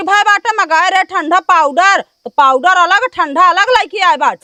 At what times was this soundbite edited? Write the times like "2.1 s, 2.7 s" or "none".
none